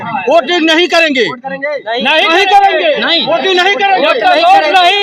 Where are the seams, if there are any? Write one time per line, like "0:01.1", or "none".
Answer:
none